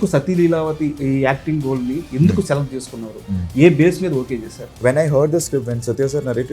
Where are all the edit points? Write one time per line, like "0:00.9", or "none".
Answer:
0:01.0
0:04.8